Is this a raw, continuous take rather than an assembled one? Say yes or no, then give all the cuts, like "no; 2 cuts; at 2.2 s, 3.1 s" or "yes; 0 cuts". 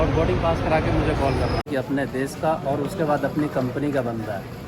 no; 1 cut; at 1.7 s